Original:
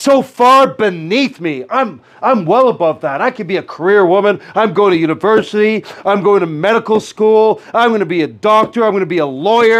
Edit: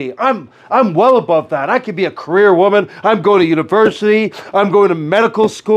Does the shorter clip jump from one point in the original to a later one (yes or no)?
no